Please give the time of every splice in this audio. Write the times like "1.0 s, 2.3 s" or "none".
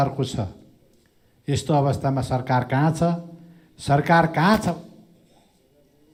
none